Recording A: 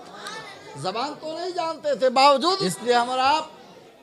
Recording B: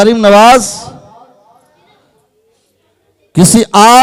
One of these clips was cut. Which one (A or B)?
A